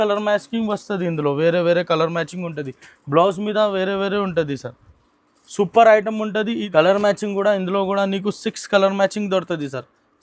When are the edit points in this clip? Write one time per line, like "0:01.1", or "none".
0:06.6